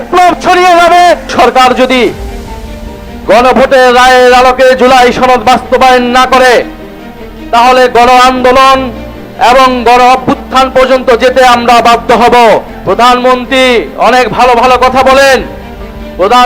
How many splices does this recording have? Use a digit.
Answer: 2